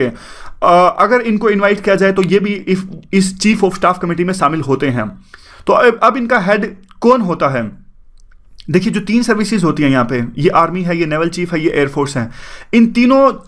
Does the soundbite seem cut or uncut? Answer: cut